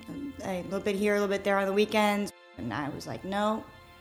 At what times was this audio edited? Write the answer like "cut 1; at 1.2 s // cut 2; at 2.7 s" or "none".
cut 1; at 2.4 s